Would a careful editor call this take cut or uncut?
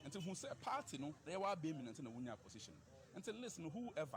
cut